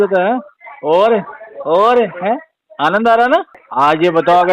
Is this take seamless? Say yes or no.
no